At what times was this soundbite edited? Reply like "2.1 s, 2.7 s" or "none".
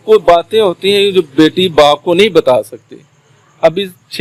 none